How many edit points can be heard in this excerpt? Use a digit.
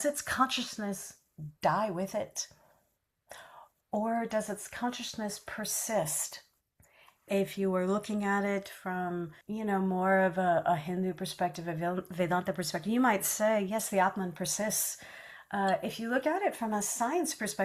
2